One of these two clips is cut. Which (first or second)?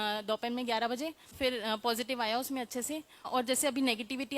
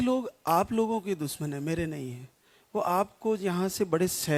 first